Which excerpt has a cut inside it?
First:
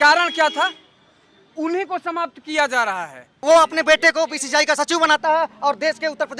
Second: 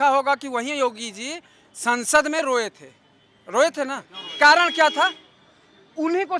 first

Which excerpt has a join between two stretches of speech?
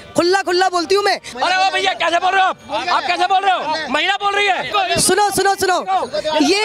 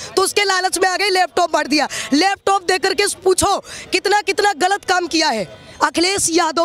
first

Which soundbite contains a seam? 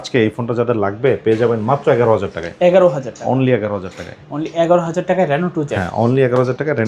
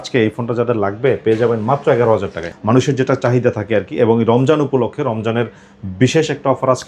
second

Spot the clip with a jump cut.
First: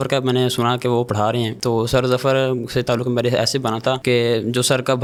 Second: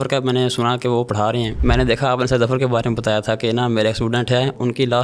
second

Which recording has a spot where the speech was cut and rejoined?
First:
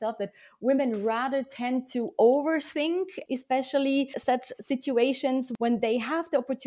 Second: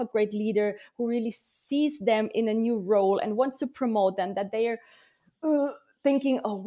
first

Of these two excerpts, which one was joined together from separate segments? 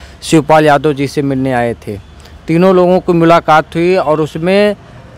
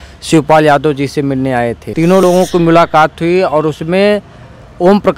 second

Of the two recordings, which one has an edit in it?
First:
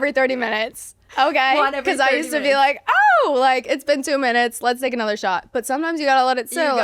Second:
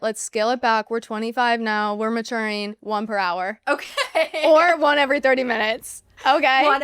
second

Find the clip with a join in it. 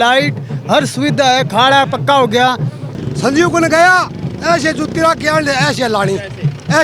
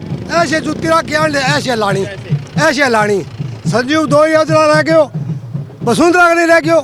first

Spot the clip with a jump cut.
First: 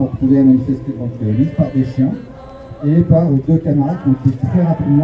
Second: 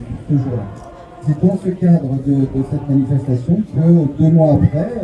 second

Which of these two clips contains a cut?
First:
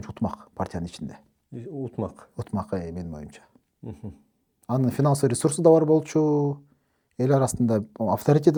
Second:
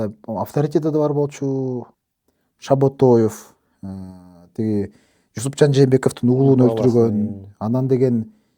second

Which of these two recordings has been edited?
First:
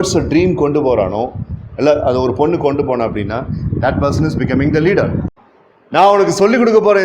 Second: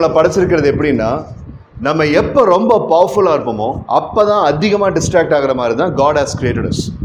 first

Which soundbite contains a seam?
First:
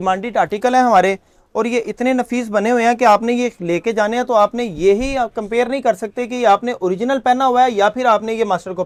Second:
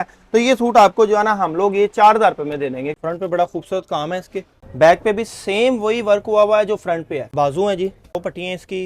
second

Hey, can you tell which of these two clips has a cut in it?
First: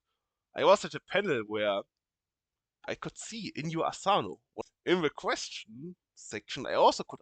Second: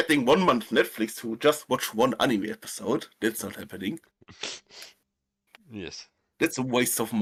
first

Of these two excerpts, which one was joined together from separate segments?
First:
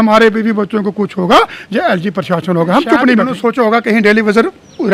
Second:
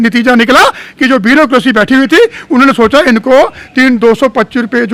first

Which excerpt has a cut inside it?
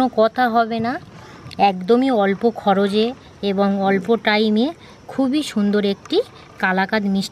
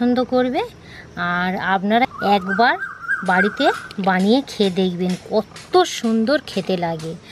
second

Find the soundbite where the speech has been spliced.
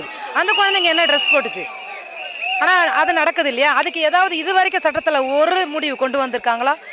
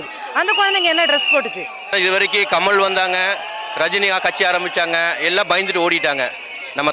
second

